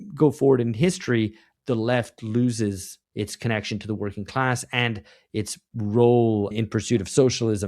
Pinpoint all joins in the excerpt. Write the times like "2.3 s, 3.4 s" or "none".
1.4 s, 2.9 s, 6.5 s